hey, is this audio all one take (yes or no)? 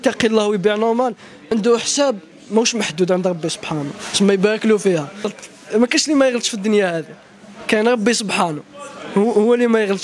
no